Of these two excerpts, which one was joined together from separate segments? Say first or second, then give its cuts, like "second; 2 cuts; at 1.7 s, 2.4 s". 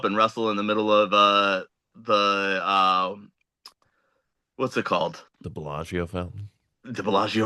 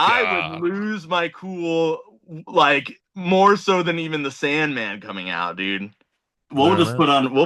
second; 1 cut; at 6.5 s